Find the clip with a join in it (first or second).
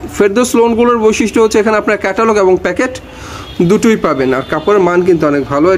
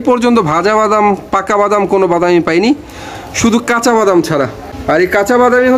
second